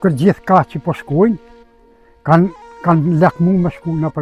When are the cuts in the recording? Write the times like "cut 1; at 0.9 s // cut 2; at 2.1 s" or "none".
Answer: none